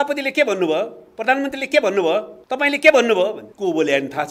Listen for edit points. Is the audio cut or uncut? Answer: cut